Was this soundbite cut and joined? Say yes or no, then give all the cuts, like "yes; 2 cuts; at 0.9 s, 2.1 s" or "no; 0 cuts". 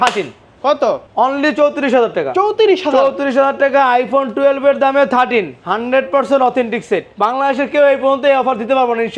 yes; 2 cuts; at 1.0 s, 7.1 s